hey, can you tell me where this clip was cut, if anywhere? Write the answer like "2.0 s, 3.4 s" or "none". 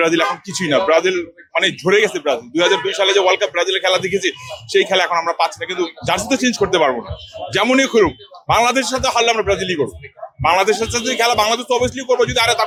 none